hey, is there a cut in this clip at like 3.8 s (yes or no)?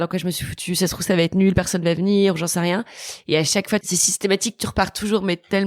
yes